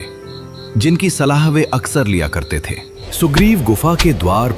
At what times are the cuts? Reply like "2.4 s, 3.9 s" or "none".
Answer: 3.0 s